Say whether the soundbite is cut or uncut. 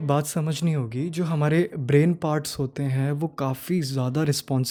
uncut